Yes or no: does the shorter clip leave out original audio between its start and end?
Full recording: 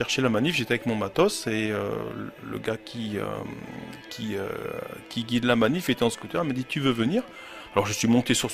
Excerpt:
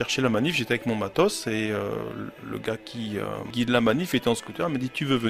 yes